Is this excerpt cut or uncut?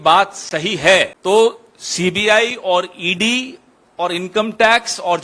cut